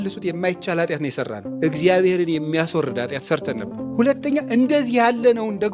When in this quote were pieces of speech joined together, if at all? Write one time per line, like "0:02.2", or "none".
0:01.4
0:03.9